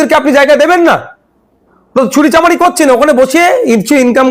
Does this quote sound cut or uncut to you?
uncut